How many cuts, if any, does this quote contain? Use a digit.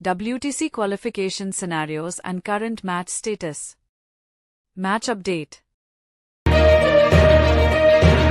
1